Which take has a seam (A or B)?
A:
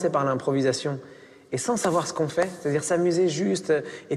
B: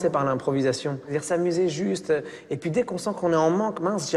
B